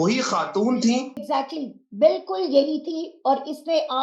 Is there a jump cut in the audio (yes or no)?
yes